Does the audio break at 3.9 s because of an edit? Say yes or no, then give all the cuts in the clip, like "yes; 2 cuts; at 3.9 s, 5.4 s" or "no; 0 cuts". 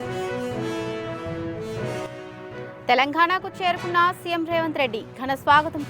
no; 1 cut; at 2.1 s